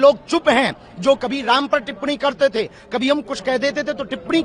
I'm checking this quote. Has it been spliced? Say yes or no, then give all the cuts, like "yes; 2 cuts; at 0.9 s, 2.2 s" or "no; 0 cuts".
no; 0 cuts